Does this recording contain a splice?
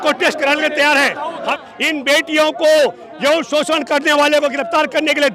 yes; 1 cut; at 1.5 s

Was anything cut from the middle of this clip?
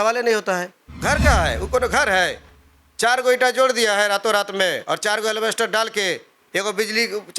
yes; 1 cut; at 0.9 s

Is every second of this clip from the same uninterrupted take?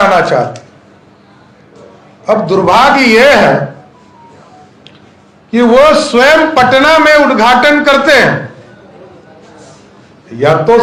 yes; 0 cuts

